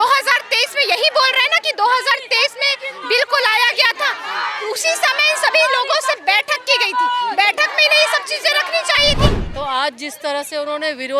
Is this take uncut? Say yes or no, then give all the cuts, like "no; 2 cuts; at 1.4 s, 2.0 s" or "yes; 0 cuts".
no; 1 cut; at 9.4 s